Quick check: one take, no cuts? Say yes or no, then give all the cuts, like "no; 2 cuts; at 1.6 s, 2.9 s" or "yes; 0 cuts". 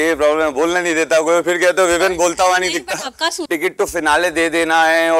no; 1 cut; at 3.4 s